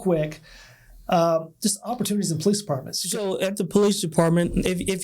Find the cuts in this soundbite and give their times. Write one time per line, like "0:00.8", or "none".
0:02.9